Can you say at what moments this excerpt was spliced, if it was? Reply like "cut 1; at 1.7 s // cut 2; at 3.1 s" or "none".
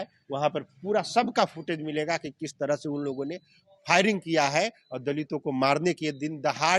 none